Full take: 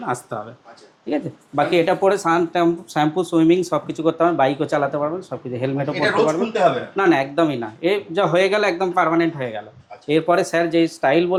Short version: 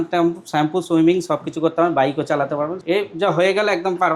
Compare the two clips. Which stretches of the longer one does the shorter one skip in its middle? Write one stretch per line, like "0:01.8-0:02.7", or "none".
0:05.2-0:07.7